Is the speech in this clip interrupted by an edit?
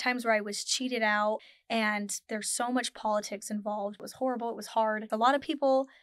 yes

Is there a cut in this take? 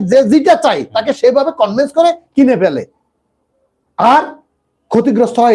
no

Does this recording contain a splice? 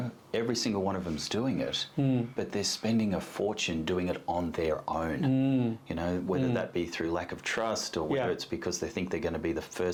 no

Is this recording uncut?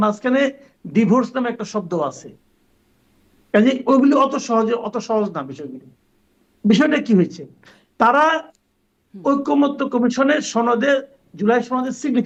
yes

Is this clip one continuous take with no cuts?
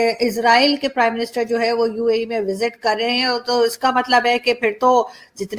yes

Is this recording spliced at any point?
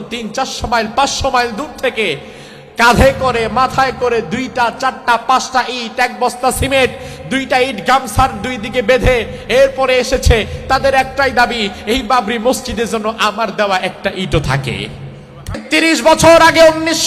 yes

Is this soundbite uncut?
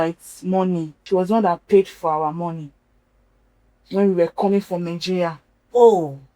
no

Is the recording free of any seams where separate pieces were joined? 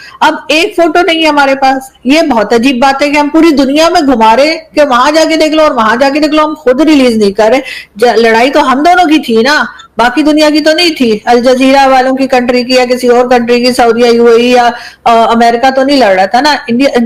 yes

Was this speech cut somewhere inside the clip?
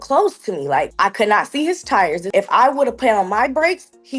yes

